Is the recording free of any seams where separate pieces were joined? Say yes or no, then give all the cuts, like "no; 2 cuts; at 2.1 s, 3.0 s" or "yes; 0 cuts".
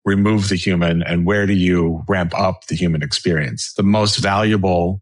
no; 1 cut; at 3.6 s